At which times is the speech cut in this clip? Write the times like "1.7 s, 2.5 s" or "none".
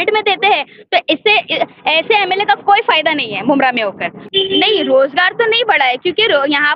none